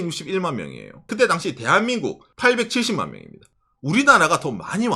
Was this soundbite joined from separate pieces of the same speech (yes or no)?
yes